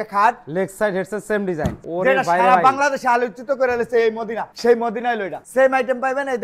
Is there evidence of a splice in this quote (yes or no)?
yes